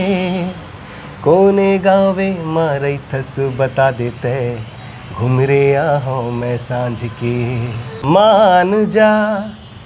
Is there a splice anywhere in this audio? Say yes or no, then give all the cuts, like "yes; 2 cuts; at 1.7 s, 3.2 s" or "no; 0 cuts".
yes; 1 cut; at 7.9 s